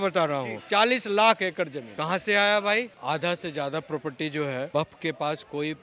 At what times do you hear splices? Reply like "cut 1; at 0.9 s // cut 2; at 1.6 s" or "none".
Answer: cut 1; at 1.9 s // cut 2; at 2.9 s // cut 3; at 4.7 s

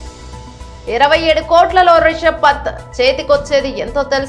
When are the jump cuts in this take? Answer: none

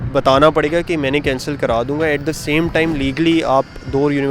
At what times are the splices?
none

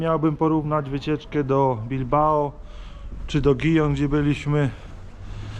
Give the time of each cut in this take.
none

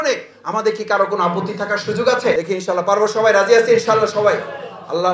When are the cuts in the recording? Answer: cut 1; at 2.5 s

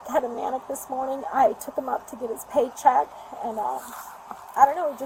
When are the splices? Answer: none

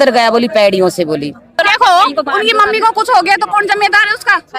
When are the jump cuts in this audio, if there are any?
cut 1; at 1.6 s

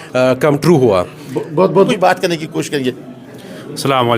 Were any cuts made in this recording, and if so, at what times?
cut 1; at 1.9 s

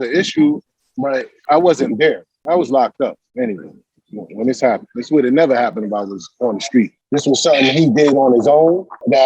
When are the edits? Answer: cut 1; at 7.0 s

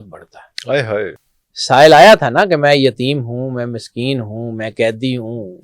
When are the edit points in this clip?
cut 1; at 1.1 s

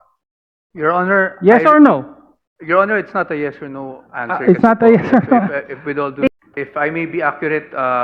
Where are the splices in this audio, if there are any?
cut 1; at 6.3 s

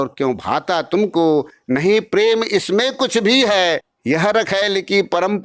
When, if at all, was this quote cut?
cut 1; at 3.9 s

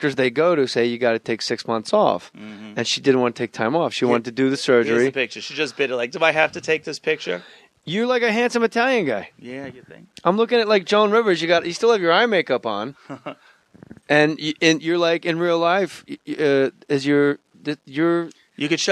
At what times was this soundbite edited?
cut 1; at 13.5 s

